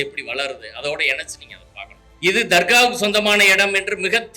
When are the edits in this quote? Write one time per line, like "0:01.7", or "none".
0:02.0